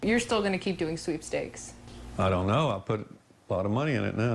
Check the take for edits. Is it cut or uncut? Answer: uncut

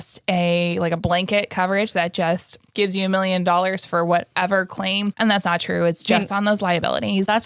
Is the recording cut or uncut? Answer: cut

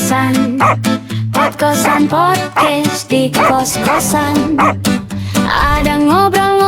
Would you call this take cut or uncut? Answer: uncut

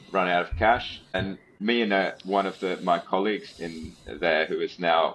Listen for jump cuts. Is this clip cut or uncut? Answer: cut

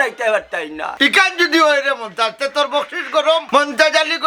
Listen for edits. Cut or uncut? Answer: uncut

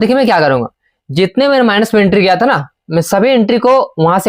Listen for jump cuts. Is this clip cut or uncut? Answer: uncut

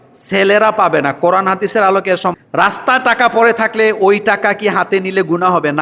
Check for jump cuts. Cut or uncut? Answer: cut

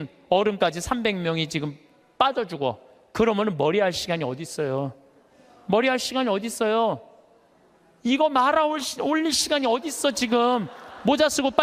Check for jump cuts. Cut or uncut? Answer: uncut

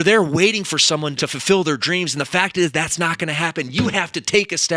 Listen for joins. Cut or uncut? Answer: cut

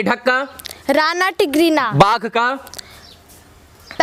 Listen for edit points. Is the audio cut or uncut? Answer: uncut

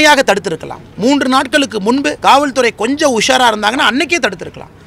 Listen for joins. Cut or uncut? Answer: cut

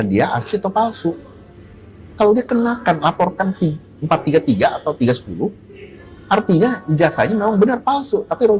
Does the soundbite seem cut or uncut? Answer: uncut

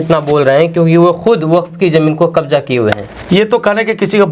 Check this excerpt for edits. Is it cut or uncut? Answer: uncut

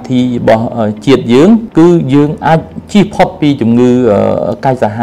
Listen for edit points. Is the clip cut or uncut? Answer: cut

